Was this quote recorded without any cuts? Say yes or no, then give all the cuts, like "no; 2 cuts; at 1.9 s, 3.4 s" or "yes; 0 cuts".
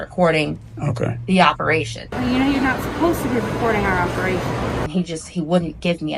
no; 2 cuts; at 2.0 s, 4.8 s